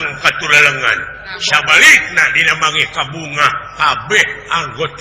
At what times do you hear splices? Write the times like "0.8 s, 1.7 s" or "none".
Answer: 1.3 s